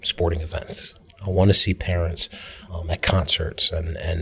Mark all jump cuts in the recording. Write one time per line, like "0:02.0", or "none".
0:02.6